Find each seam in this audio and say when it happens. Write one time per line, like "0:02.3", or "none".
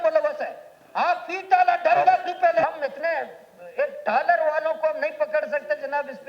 0:02.6